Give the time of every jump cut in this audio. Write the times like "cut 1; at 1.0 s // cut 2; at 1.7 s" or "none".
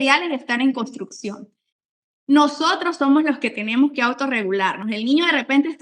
cut 1; at 1.7 s